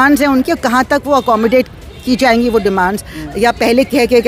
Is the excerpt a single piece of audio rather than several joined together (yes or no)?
yes